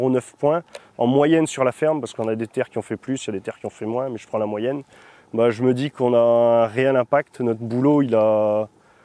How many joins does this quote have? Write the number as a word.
zero